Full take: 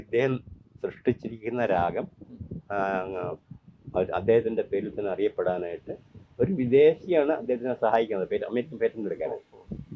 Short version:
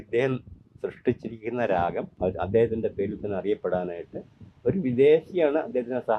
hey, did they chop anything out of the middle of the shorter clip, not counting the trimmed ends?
yes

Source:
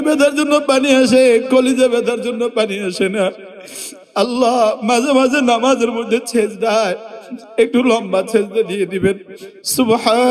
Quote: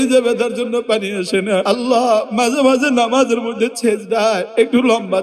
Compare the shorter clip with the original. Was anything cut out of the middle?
yes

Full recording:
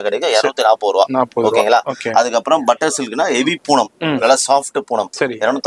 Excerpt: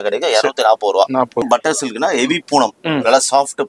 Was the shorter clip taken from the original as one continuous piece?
no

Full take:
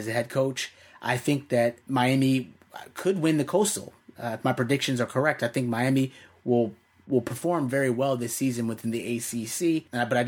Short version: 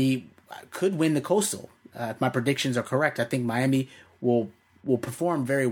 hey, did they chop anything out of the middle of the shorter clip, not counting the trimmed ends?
no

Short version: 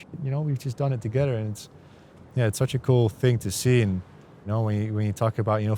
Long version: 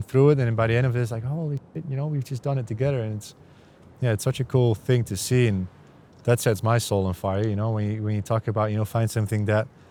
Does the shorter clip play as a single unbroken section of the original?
no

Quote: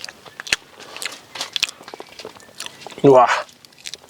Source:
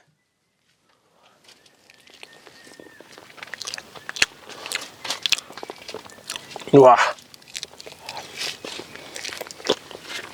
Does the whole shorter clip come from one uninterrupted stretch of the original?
yes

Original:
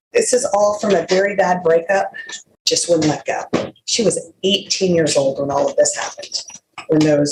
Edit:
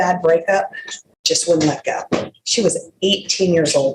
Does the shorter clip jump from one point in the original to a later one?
no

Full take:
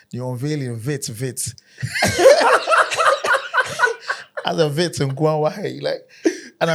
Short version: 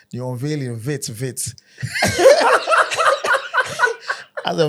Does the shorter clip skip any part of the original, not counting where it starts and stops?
no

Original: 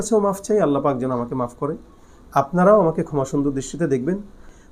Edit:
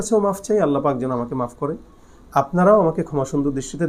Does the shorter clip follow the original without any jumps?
yes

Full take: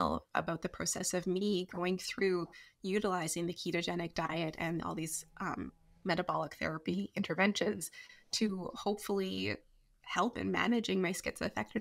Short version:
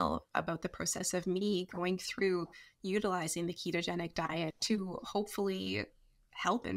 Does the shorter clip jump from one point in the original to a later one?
yes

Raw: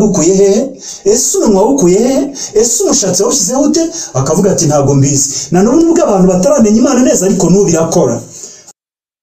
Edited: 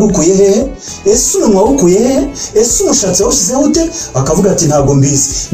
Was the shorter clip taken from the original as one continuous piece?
yes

